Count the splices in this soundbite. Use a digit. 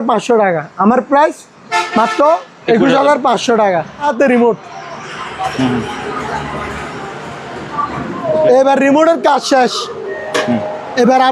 1